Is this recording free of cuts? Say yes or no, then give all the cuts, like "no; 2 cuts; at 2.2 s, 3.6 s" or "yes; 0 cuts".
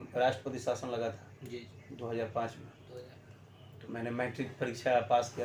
yes; 0 cuts